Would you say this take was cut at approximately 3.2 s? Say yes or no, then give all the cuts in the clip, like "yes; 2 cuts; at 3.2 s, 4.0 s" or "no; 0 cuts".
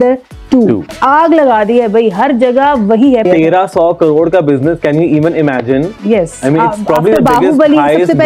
yes; 2 cuts; at 0.9 s, 3.2 s